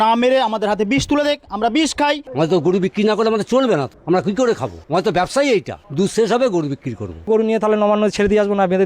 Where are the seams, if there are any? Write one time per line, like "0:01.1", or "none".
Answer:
0:02.2
0:03.9
0:04.7
0:05.8
0:07.3

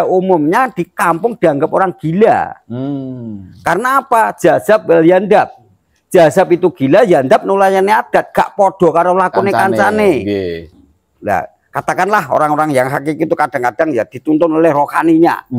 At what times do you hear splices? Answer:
0:10.6

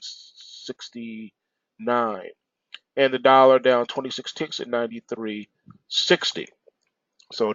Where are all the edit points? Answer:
none

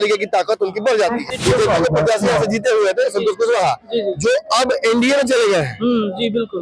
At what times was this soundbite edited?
0:01.2

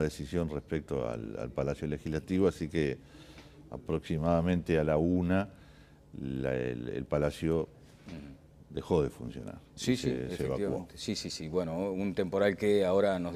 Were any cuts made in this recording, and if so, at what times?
none

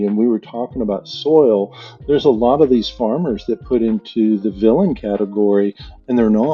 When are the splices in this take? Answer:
none

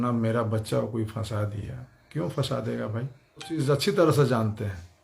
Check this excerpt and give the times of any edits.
0:03.6

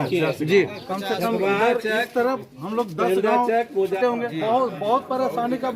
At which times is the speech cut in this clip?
0:04.0

